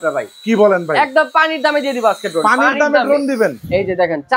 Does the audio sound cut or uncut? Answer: uncut